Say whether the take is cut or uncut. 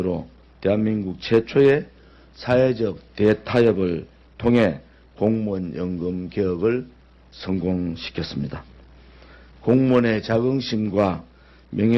uncut